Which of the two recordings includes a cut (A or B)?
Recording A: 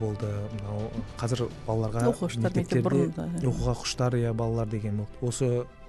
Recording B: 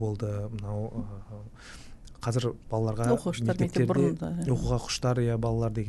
A